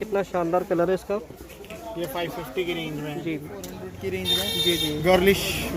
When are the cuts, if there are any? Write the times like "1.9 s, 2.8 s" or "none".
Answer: 3.9 s